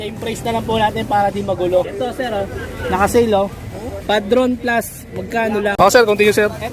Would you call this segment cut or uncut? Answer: cut